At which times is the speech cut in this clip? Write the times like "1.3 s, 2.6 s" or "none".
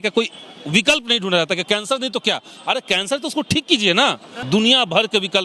4.3 s